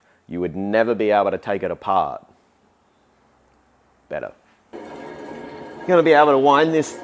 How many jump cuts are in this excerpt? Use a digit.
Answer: 1